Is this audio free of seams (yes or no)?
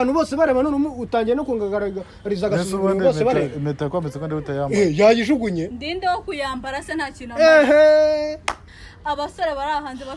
no